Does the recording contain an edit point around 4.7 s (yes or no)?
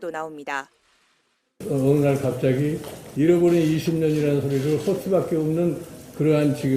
no